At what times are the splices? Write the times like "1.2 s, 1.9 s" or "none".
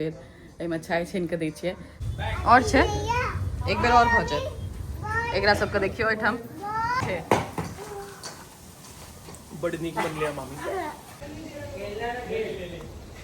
1.9 s, 7.0 s, 11.2 s

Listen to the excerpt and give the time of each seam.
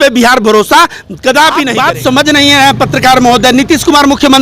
1.8 s

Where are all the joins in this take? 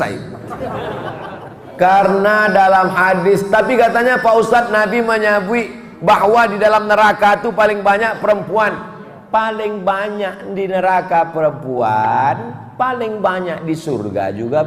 1.6 s

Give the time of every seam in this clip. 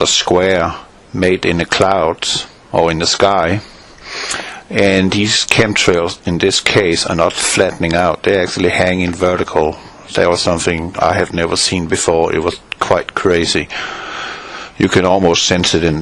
1.3 s

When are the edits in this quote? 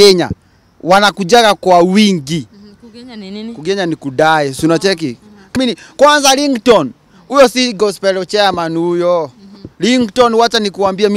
5.5 s

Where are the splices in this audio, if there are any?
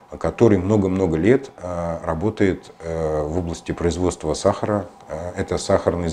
none

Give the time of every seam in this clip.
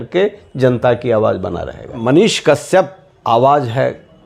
2.0 s, 3.1 s

